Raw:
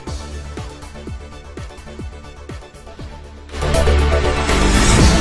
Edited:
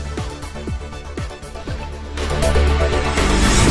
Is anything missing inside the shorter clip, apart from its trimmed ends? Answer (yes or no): yes